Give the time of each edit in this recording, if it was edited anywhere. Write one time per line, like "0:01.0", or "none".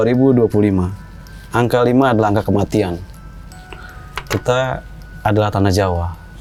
none